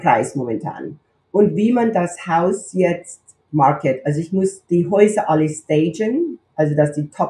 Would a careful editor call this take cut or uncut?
cut